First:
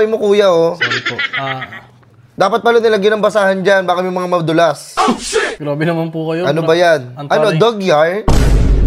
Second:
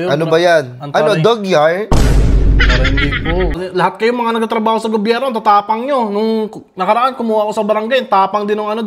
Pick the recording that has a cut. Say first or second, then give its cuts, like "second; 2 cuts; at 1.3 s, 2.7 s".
second; 1 cut; at 3.6 s